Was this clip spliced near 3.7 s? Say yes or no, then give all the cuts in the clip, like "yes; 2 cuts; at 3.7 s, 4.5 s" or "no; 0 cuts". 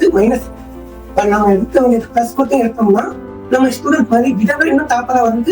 no; 0 cuts